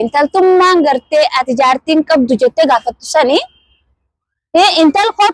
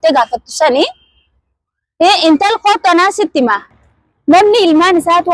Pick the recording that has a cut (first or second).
second